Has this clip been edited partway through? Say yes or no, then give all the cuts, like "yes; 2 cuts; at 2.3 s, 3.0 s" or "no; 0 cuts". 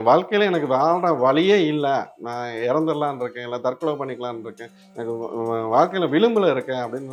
no; 0 cuts